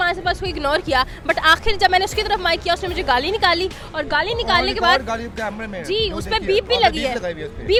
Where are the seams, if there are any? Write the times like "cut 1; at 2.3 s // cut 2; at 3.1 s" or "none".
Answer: none